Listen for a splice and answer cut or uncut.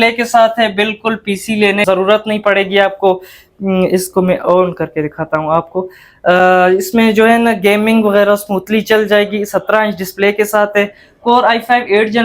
cut